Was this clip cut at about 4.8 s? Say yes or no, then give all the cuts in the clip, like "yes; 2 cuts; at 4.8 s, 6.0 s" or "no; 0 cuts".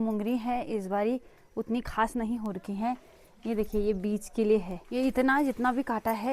yes; 1 cut; at 4.8 s